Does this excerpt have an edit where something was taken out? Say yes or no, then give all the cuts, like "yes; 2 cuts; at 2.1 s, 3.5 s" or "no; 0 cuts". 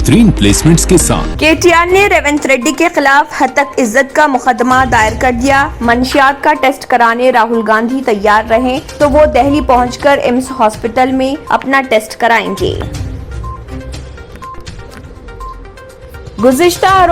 yes; 1 cut; at 1.3 s